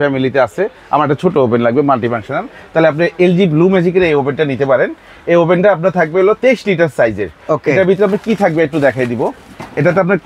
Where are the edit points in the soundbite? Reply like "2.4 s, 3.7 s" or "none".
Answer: none